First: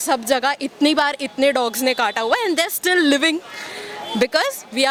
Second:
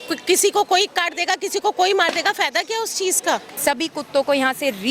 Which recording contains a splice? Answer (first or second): second